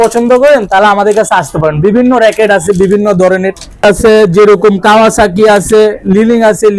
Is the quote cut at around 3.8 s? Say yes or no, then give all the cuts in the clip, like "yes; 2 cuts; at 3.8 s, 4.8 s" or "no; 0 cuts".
yes; 1 cut; at 3.8 s